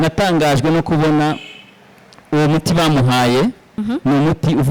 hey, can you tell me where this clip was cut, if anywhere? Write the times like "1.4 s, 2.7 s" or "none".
3.8 s